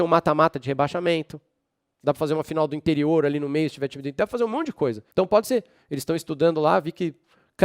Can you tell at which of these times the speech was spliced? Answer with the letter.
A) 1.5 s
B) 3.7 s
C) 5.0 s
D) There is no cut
C